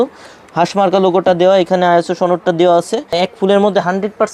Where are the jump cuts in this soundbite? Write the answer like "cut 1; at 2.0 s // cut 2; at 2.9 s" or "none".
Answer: cut 1; at 3.1 s